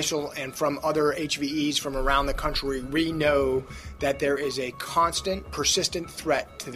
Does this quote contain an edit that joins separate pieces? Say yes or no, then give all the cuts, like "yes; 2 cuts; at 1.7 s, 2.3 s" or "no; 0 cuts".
no; 0 cuts